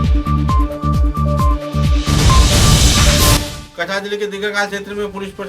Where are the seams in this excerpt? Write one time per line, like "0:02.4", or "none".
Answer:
0:03.5